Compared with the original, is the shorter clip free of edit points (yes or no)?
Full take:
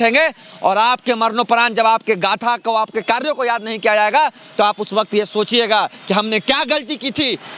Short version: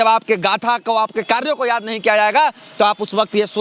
yes